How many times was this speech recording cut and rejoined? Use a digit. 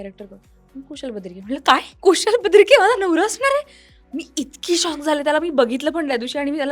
1